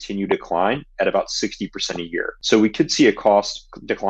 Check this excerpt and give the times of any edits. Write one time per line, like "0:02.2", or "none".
0:02.4